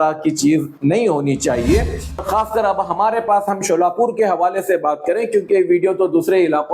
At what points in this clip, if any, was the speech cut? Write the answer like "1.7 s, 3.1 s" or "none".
2.2 s